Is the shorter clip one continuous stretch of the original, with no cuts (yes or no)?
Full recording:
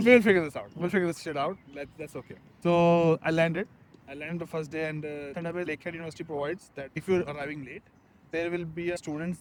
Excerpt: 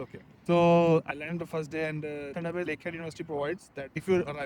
no